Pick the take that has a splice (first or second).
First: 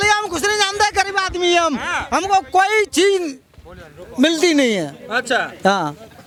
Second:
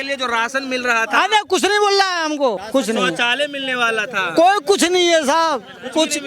second